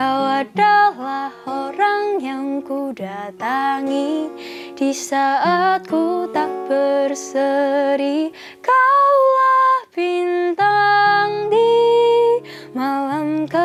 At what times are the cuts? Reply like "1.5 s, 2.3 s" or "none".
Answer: none